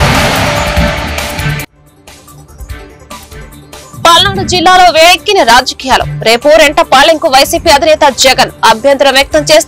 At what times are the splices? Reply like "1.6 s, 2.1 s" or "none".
3.4 s